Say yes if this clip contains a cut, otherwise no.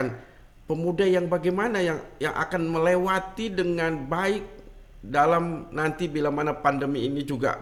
no